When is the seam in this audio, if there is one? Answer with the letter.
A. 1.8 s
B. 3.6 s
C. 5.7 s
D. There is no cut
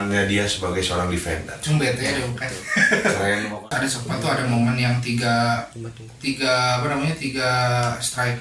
B